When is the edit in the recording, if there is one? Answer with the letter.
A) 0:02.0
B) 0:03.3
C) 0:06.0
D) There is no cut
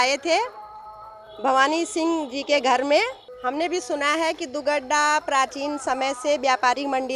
B